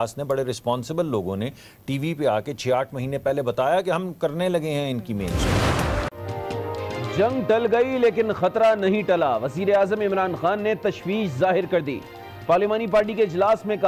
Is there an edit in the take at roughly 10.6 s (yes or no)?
no